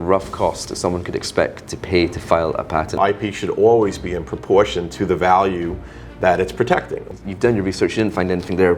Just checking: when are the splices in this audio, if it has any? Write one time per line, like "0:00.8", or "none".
0:03.0
0:07.1

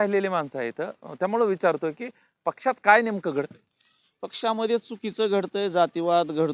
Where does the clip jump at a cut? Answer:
none

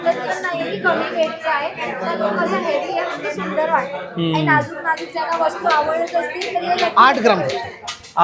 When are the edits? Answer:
none

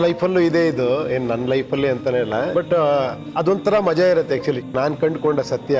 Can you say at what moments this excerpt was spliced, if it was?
0:02.5
0:03.2
0:04.7

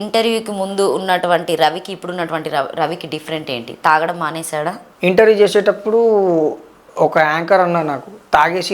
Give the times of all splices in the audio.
0:04.9

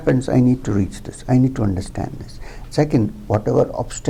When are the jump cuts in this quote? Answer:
none

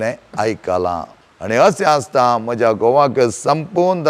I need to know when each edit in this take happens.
0:01.1

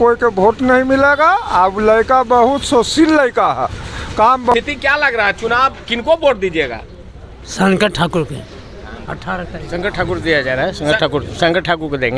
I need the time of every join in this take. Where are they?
0:04.5

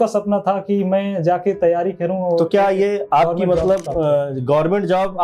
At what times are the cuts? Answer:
none

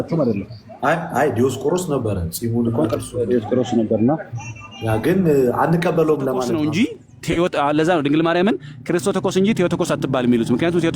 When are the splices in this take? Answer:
0:06.5

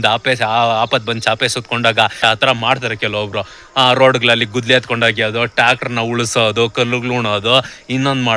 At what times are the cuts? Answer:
0:02.2

